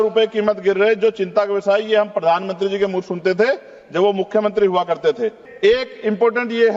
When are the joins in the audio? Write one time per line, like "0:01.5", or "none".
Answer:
0:05.5